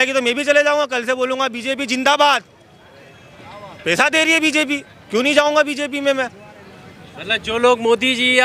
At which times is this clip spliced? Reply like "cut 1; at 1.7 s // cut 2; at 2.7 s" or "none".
none